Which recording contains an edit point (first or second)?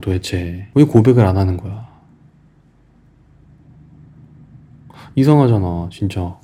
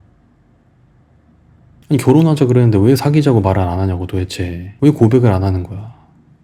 second